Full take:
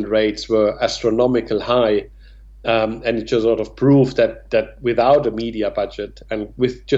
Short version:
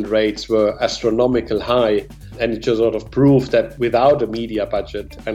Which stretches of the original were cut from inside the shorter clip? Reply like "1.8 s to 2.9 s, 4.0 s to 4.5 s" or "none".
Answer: 2.3 s to 3.0 s, 4.4 s to 4.8 s